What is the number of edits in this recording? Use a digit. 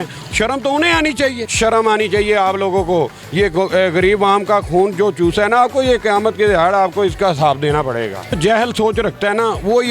2